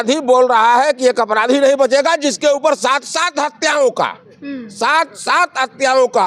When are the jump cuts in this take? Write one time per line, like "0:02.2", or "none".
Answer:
none